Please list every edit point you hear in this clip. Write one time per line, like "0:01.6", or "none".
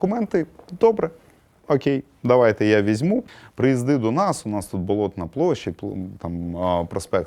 0:03.3